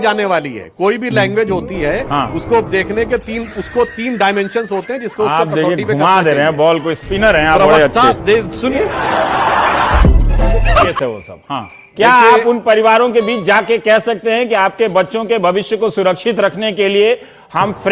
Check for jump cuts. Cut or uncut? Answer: cut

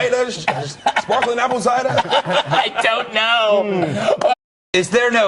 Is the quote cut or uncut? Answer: uncut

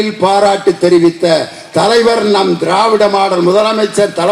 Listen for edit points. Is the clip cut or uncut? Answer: uncut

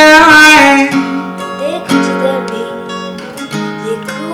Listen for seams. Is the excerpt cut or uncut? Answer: uncut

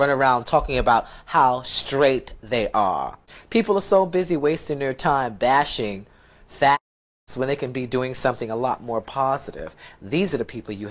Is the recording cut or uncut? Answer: uncut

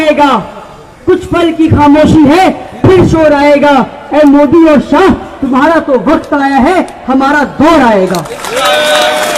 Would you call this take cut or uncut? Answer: uncut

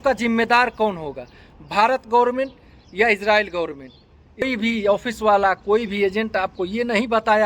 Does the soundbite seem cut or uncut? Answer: cut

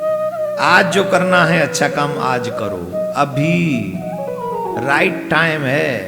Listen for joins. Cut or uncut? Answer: uncut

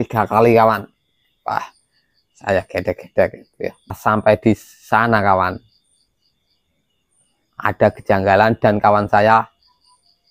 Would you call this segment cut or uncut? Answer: cut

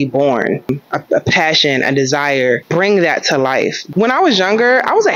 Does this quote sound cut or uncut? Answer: cut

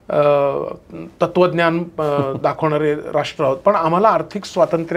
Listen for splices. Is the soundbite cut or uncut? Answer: uncut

